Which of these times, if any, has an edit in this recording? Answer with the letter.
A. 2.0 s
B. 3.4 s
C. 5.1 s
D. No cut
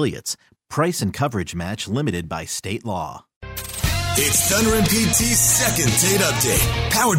B